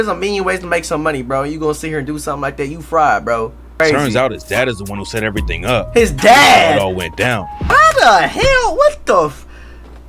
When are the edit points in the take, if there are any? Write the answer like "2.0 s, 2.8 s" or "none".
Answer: 3.7 s, 7.7 s